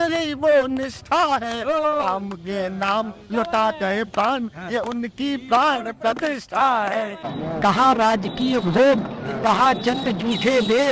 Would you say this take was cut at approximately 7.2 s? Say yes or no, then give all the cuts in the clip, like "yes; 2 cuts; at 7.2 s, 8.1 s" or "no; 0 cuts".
yes; 1 cut; at 7.2 s